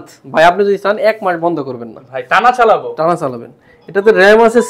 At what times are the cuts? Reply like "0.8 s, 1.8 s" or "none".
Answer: none